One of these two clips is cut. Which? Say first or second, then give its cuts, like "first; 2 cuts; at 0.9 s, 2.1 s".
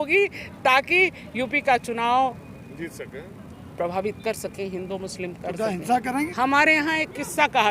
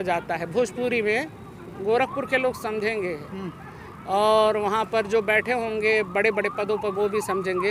first; 1 cut; at 6.0 s